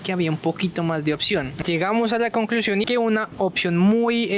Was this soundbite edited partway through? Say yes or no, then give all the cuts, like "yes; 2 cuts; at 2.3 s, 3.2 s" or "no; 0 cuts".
yes; 2 cuts; at 1.5 s, 2.8 s